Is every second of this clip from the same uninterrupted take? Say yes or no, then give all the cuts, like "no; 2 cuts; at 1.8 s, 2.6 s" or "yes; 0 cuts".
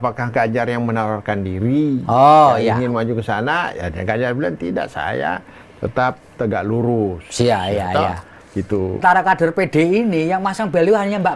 no; 1 cut; at 9.0 s